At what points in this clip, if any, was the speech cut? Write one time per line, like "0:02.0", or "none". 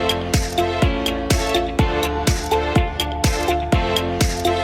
none